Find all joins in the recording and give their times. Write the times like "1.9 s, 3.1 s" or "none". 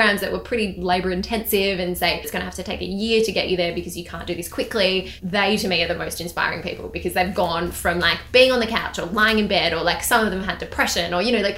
2.3 s, 5.2 s